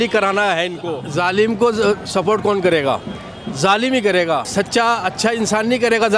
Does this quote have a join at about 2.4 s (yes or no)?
no